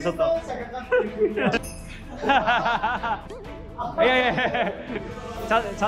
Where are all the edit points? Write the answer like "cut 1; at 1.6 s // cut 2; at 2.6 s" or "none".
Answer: cut 1; at 1.6 s // cut 2; at 3.3 s